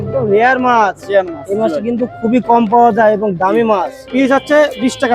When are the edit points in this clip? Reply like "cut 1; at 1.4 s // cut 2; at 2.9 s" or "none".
cut 1; at 4.0 s